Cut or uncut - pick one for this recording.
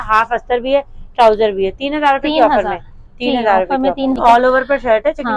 cut